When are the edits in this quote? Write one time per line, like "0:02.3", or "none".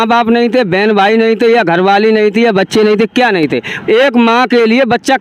none